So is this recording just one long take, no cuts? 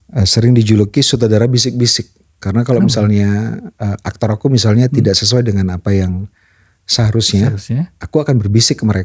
yes; 0 cuts

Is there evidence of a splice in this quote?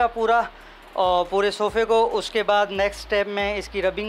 no; 0 cuts

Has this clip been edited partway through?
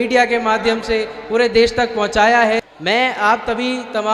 yes; 1 cut; at 2.7 s

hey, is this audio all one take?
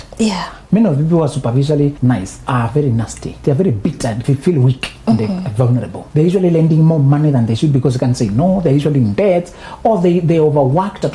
no; 4 cuts; at 2.1 s, 3.2 s, 4.2 s, 6.0 s

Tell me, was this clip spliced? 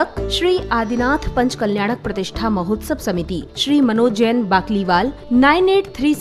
no; 0 cuts

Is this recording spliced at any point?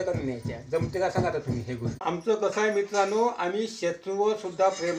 yes; 1 cut; at 1.9 s

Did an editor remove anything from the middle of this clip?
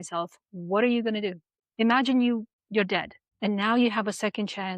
yes; 1 cut; at 1.5 s

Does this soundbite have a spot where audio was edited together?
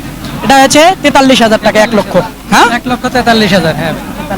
no; 0 cuts

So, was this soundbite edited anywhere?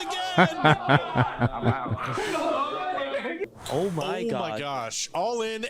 yes; 1 cut; at 3.5 s

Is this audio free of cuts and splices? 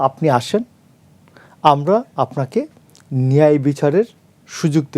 yes; 0 cuts

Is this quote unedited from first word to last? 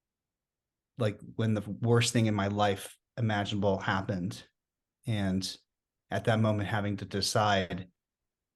yes; 0 cuts

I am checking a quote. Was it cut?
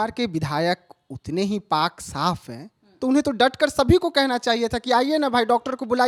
no; 0 cuts

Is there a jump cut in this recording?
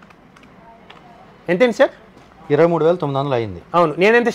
no; 0 cuts

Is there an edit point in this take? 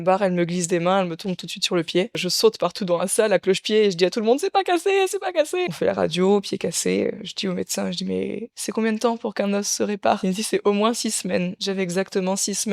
yes; 4 cuts; at 2.3 s, 5.7 s, 10.2 s, 11.9 s

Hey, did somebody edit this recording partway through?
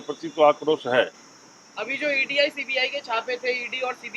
no; 0 cuts

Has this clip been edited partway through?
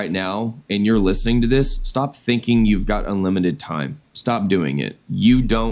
no; 0 cuts

